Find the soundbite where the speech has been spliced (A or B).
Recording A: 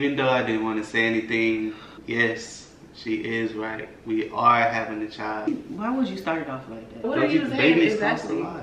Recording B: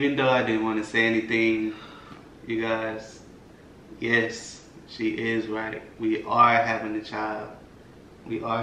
A